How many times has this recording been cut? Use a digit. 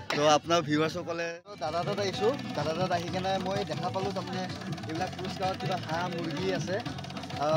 1